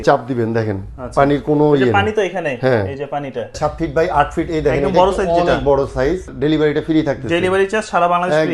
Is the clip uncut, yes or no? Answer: no